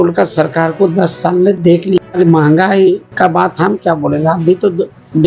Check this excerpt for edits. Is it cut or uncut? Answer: cut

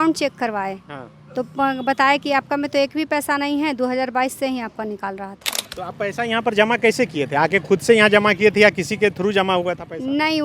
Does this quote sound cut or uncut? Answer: cut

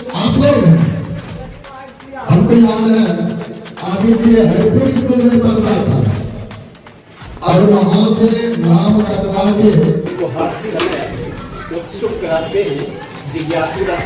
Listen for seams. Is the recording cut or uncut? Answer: cut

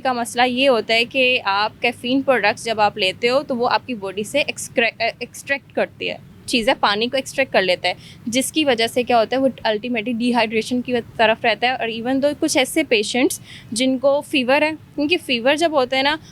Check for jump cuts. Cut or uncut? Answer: uncut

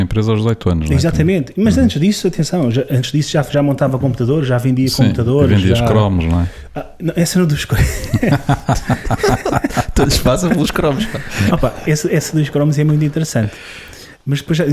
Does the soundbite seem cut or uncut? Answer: uncut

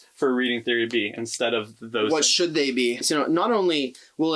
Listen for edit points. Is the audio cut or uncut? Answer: cut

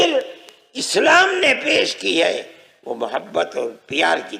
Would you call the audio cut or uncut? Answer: uncut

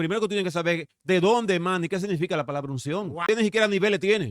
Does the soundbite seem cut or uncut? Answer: cut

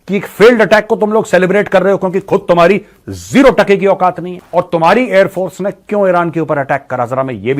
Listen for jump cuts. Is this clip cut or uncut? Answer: cut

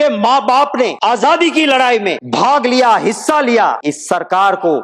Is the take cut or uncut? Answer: cut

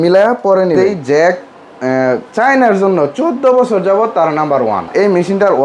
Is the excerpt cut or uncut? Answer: cut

